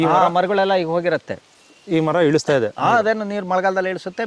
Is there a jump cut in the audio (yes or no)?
no